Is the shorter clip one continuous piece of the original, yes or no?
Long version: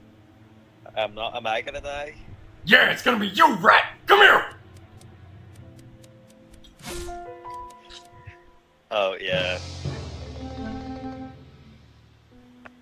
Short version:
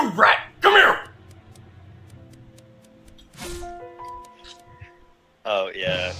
yes